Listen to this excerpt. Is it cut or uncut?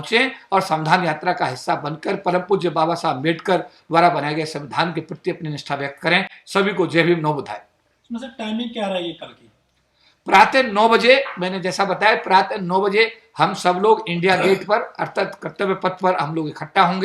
uncut